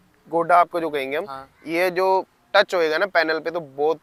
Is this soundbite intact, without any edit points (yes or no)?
yes